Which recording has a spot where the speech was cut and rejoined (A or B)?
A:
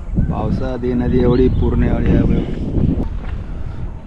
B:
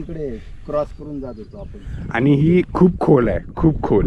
A